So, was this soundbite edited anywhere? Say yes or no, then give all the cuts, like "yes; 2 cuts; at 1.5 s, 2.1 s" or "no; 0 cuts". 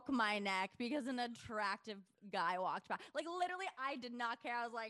no; 0 cuts